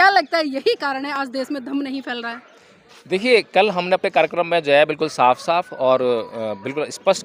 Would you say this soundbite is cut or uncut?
uncut